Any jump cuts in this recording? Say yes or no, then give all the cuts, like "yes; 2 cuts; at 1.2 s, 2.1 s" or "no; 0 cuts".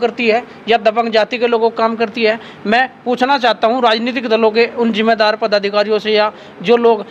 no; 0 cuts